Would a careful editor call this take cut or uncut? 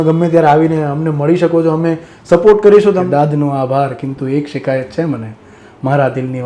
cut